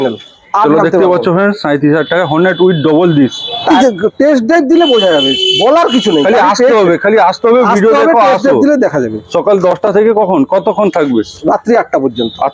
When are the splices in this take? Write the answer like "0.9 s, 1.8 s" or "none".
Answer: 3.8 s